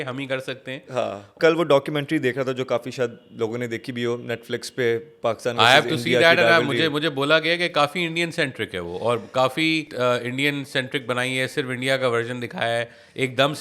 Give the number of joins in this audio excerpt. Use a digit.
2